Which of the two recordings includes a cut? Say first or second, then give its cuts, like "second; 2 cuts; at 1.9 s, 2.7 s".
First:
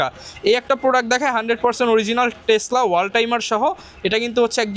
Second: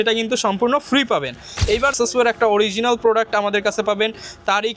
second; 1 cut; at 1.9 s